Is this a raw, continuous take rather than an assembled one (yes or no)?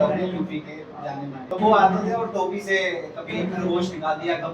no